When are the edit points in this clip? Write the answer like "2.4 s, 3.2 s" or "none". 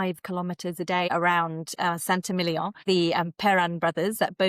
1.1 s, 2.8 s